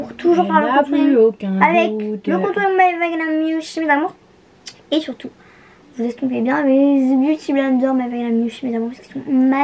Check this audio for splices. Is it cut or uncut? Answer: uncut